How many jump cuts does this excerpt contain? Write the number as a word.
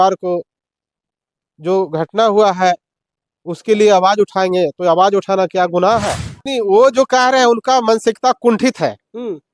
one